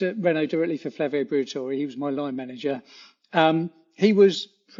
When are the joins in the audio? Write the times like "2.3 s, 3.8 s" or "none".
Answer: none